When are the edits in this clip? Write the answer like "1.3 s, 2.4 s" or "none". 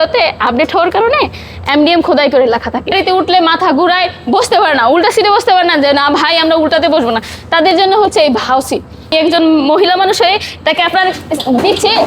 2.9 s, 9.1 s